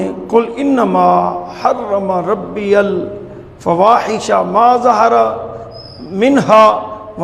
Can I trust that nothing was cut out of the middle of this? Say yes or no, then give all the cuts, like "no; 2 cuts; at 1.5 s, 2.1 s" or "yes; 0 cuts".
yes; 0 cuts